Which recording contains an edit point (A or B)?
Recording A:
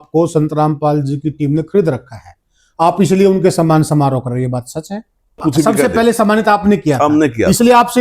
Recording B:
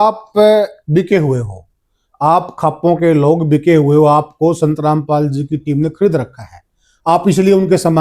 A